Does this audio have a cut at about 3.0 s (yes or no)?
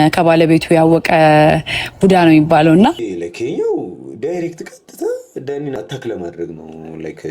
yes